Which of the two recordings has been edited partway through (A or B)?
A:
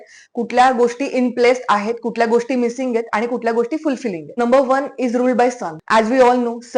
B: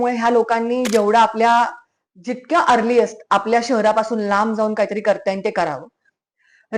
A